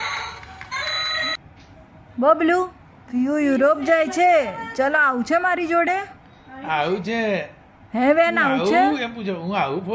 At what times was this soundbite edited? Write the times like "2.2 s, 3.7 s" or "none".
1.4 s